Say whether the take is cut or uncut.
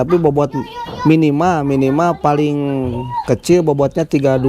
uncut